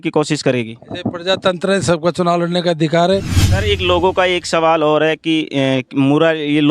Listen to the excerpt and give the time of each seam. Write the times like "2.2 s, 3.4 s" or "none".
3.4 s